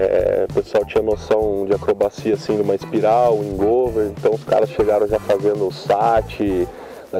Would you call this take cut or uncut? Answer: uncut